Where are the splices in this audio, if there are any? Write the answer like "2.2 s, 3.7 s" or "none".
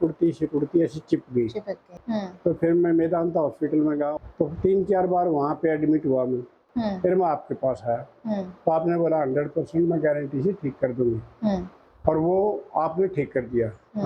1.8 s, 4.1 s, 6.6 s